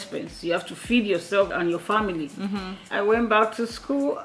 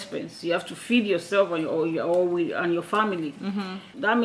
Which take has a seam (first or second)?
first